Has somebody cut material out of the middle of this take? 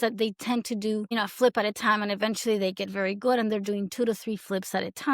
yes; 1 cut; at 1.1 s

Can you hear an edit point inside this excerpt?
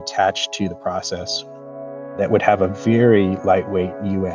no; 0 cuts

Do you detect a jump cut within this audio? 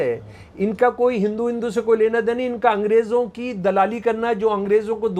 no; 0 cuts

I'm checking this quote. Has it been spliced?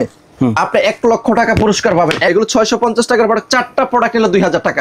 yes; 1 cut; at 2.3 s

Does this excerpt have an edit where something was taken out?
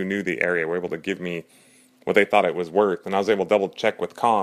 no; 0 cuts

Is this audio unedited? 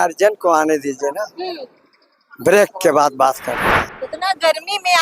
no; 1 cut; at 3.9 s

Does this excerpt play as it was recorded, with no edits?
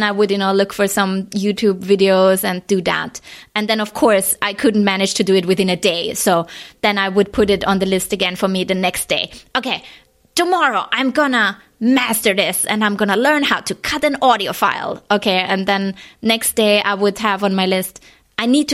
yes; 0 cuts

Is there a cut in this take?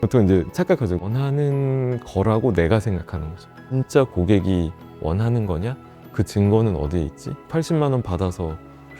yes; 2 cuts; at 1.1 s, 3.8 s

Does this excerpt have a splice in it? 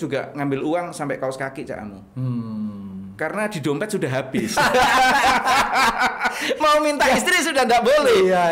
no; 0 cuts

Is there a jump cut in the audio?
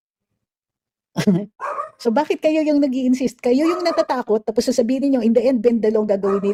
no; 0 cuts

